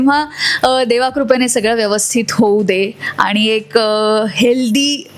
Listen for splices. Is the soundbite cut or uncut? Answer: uncut